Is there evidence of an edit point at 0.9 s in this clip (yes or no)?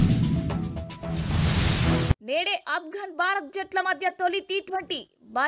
no